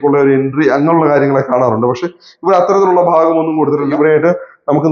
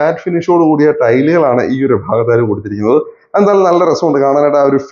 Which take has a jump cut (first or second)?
first